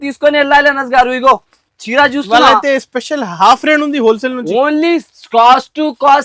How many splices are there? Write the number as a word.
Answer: zero